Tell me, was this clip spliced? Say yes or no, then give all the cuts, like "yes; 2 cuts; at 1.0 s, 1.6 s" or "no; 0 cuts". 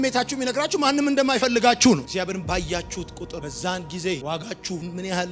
no; 0 cuts